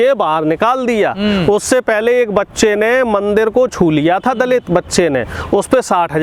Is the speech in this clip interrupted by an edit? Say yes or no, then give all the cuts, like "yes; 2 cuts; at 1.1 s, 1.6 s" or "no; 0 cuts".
no; 0 cuts